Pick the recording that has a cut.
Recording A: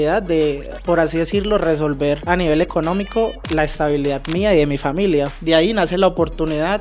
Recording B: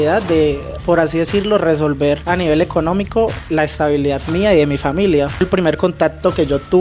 B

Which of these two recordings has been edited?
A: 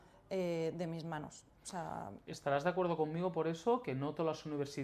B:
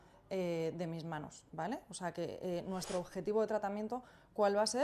B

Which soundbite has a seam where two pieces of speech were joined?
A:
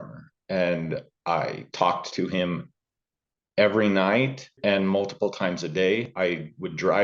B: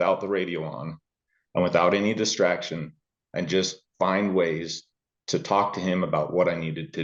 A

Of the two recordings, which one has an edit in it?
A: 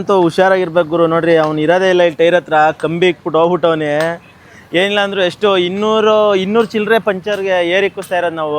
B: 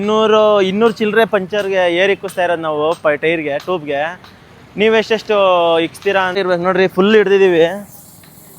B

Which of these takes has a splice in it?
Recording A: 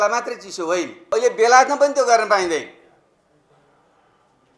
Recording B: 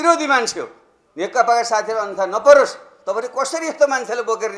A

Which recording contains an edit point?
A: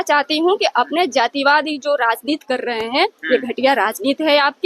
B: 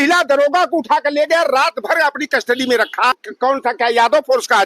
B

